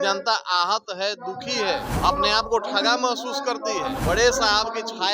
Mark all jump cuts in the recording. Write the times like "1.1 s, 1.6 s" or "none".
1.9 s, 4.0 s